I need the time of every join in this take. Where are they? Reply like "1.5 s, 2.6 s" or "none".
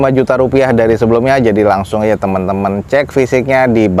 none